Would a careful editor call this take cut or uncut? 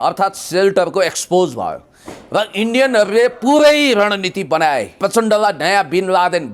cut